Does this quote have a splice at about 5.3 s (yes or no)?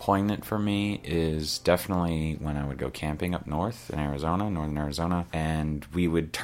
yes